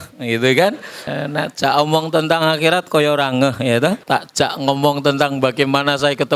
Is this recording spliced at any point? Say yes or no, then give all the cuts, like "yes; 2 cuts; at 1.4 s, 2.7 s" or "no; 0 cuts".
yes; 2 cuts; at 1.0 s, 4.0 s